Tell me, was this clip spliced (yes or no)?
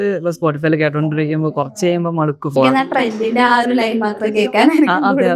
yes